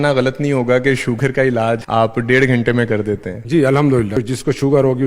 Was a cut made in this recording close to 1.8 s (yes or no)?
yes